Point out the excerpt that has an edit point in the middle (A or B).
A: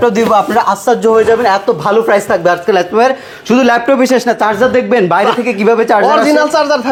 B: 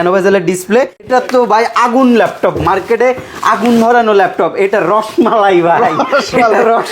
B